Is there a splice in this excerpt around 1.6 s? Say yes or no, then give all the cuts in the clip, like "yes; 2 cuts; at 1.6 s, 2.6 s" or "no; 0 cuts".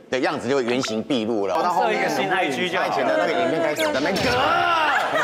yes; 1 cut; at 1.6 s